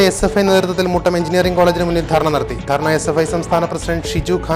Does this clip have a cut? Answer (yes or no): no